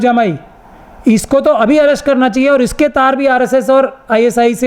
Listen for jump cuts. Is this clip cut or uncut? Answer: uncut